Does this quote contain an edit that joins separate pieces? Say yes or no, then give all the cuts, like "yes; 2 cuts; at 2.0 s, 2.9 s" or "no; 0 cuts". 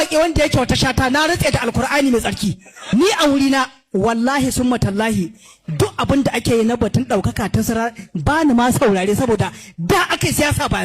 yes; 1 cut; at 2.7 s